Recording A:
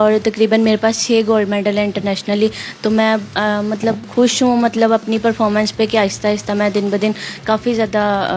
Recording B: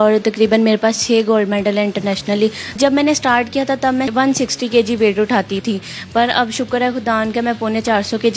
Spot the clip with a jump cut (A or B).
B